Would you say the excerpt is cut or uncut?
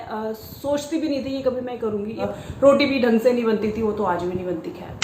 cut